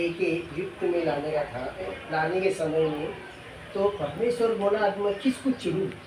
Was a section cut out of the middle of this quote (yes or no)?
yes